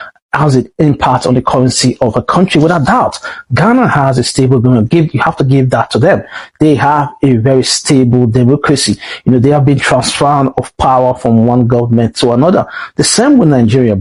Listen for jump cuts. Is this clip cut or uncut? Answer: uncut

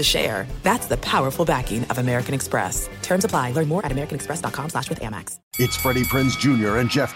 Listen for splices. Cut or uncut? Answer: cut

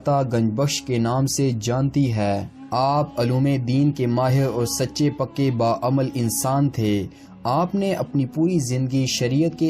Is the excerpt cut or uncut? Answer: uncut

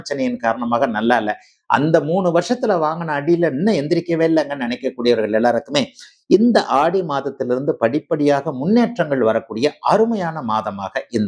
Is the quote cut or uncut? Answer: uncut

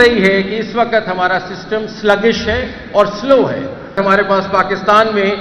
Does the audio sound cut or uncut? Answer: cut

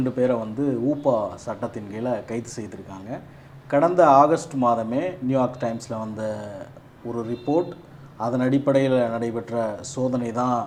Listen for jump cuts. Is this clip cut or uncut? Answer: uncut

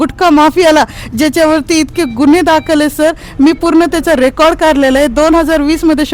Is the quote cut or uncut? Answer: uncut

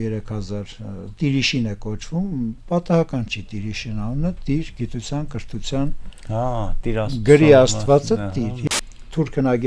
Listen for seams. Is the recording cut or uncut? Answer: cut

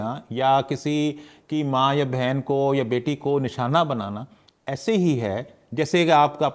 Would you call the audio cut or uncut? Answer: uncut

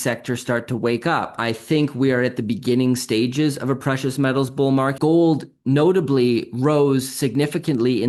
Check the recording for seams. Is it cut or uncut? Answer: cut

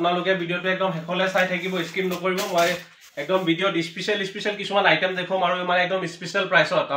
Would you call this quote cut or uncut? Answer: uncut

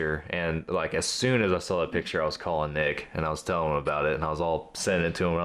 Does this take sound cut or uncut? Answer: uncut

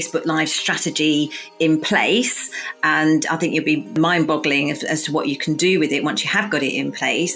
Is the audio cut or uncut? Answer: cut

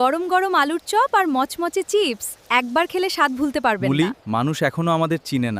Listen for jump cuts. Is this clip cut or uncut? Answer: uncut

